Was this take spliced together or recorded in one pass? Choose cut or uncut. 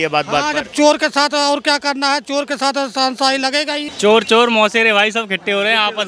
cut